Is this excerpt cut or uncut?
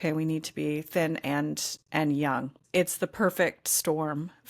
cut